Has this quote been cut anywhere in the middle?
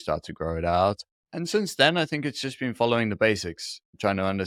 no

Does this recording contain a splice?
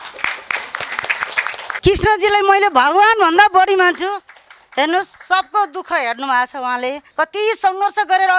yes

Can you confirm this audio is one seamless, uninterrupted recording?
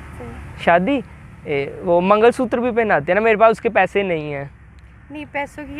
yes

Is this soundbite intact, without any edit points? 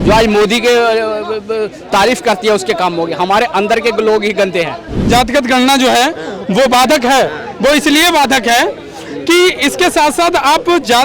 no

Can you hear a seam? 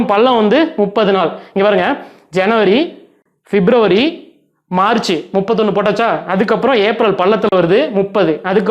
no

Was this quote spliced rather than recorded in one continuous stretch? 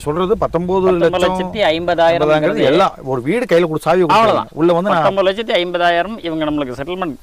no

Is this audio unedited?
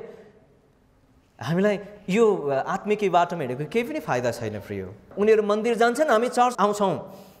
no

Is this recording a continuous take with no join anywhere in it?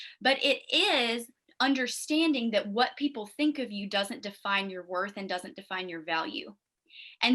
yes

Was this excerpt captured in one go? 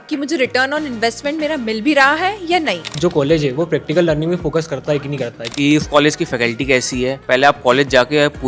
no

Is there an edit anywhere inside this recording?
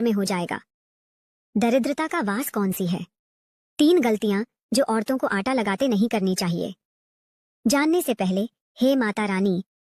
no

